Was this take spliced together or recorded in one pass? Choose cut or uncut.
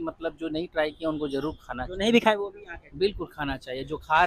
uncut